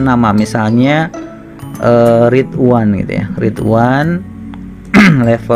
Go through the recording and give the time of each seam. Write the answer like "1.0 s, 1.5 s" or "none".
none